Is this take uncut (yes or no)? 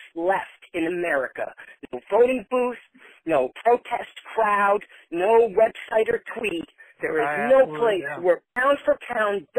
no